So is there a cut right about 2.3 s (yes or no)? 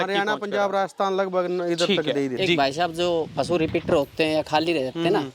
yes